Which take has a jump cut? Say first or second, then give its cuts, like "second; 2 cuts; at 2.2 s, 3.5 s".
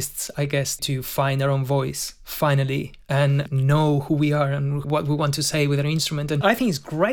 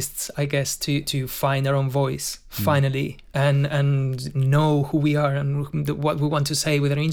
first; 4 cuts; at 0.8 s, 3.4 s, 4.8 s, 6.4 s